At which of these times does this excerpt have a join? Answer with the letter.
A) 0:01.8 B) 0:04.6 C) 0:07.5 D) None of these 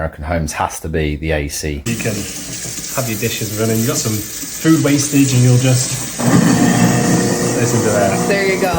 A